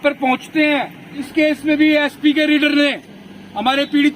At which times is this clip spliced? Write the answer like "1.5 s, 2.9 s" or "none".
1.3 s